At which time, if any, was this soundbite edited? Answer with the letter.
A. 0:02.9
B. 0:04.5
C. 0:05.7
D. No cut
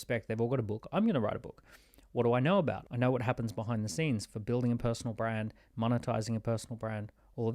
A